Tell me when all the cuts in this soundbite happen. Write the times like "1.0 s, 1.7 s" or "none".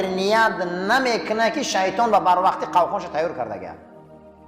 none